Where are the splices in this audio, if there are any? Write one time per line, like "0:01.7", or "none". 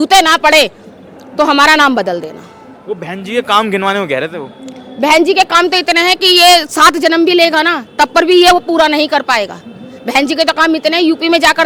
none